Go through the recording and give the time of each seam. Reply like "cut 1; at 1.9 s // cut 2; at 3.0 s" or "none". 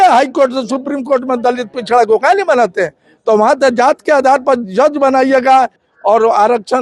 cut 1; at 5.9 s